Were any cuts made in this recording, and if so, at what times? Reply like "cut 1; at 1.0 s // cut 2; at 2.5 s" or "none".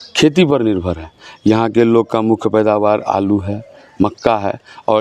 none